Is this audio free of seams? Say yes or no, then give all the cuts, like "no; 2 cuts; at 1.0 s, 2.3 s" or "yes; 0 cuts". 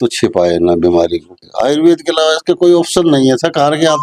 no; 1 cut; at 1.3 s